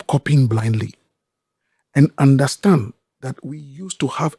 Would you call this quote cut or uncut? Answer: uncut